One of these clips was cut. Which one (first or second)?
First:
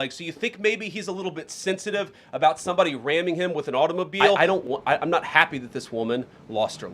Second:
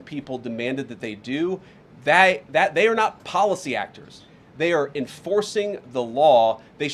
first